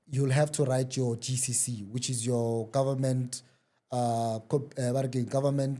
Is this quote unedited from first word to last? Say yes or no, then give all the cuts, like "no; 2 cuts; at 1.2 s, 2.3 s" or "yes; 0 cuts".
yes; 0 cuts